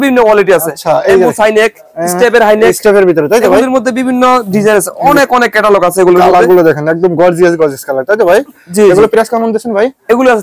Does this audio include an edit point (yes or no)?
no